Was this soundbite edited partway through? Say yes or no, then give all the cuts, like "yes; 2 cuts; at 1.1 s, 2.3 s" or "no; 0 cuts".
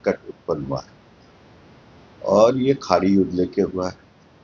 no; 0 cuts